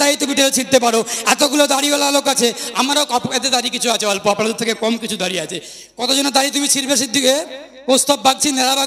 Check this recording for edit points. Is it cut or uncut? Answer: uncut